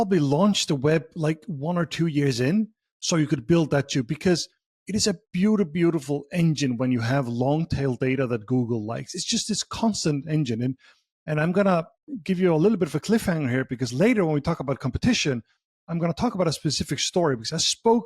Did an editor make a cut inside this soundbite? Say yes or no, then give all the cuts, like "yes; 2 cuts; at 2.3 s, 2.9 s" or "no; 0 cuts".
no; 0 cuts